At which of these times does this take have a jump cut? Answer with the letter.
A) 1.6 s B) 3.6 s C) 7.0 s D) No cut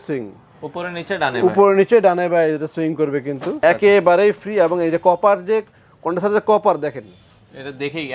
B